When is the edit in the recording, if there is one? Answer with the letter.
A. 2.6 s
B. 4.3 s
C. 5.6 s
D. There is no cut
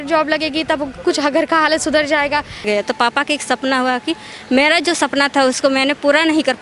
A